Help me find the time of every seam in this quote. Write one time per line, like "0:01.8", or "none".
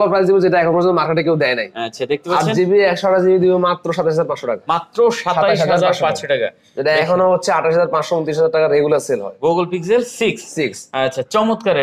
none